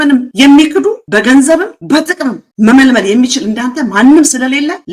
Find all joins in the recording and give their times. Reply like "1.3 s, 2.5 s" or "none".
none